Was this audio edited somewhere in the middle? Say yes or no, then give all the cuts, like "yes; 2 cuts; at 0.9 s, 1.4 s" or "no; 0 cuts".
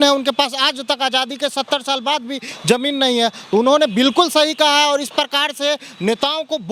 no; 0 cuts